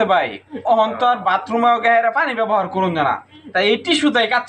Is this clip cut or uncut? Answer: uncut